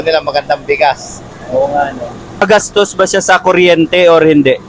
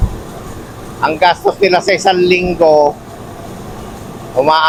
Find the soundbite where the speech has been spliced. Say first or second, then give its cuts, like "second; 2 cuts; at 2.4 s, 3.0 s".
first; 1 cut; at 2.4 s